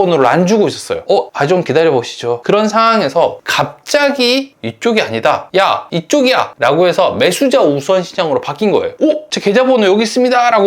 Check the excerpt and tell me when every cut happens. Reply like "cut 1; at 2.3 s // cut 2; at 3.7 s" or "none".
cut 1; at 2.4 s // cut 2; at 4.6 s // cut 3; at 9.0 s